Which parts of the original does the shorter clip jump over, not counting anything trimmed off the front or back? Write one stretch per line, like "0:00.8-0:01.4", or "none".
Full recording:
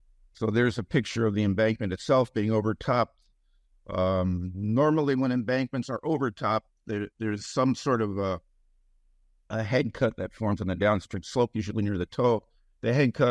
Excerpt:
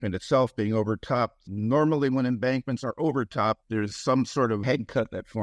0:03.2-0:04.5
0:06.7-0:07.1
0:08.1-0:09.7